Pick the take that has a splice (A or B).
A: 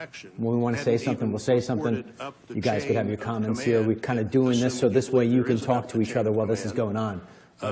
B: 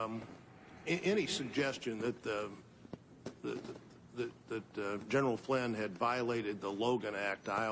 B